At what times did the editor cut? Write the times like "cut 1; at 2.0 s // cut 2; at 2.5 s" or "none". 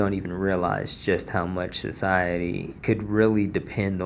cut 1; at 2.7 s